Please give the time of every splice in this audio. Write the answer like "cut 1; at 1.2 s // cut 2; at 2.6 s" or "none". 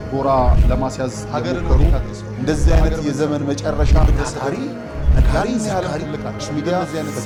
none